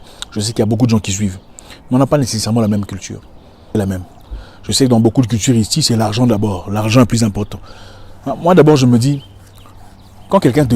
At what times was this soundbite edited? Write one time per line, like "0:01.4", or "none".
0:03.7